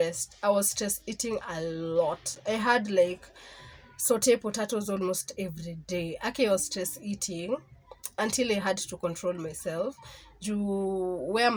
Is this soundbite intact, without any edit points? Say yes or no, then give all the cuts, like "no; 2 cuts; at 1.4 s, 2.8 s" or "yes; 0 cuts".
yes; 0 cuts